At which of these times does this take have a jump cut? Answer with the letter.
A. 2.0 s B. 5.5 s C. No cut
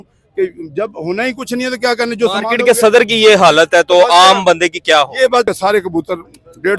B